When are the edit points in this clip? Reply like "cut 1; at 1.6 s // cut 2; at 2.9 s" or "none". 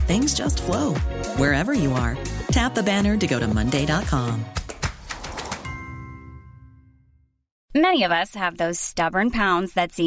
cut 1; at 7.5 s